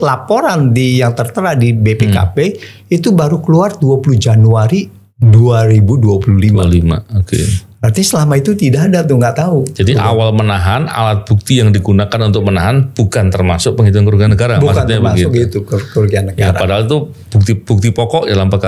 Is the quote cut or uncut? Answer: uncut